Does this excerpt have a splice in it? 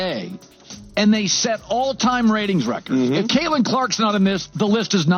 no; 0 cuts

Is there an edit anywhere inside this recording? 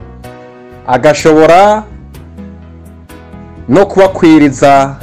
yes; 2 cuts; at 1.9 s, 3.4 s

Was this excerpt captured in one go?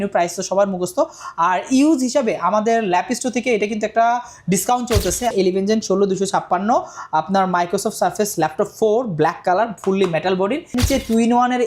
no; 2 cuts; at 5.3 s, 10.7 s

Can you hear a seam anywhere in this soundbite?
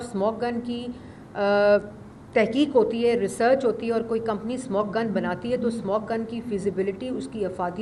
no; 0 cuts

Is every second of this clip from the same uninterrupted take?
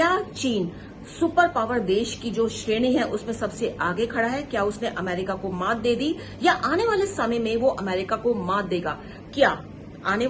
yes; 0 cuts

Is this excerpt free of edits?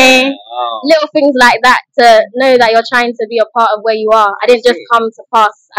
yes; 0 cuts

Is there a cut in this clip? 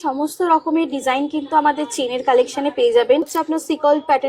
yes; 1 cut; at 3.4 s

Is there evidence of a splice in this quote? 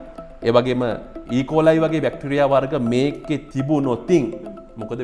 no; 0 cuts

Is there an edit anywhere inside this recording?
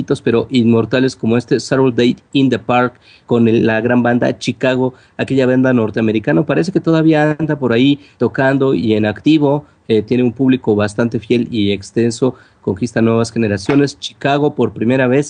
yes; 1 cut; at 9.0 s

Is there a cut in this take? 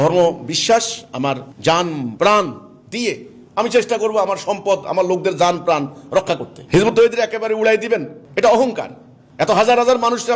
yes; 1 cut; at 6.5 s

